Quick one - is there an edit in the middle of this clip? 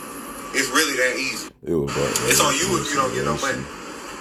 no; 0 cuts

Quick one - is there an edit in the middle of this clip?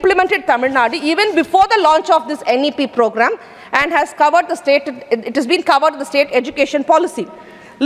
no; 0 cuts

